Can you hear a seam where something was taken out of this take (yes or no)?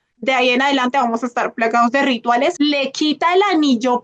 yes